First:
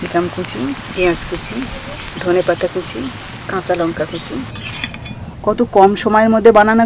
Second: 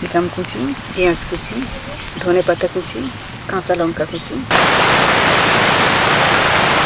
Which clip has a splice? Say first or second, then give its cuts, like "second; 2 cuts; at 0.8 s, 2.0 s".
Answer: first; 1 cut; at 4.4 s